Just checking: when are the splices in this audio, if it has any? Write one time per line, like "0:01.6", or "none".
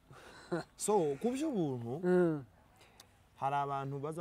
none

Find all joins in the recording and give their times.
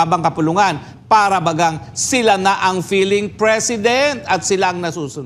none

